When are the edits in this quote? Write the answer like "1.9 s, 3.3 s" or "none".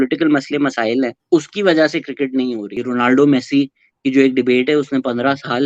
1.2 s, 2.8 s